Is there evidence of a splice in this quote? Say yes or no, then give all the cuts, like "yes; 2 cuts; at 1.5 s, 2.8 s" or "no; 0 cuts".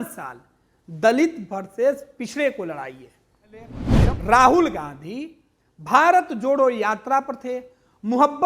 yes; 1 cut; at 3.8 s